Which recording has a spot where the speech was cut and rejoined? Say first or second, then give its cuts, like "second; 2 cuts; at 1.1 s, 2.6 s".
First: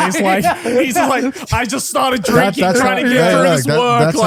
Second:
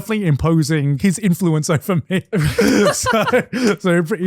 second; 1 cut; at 1.0 s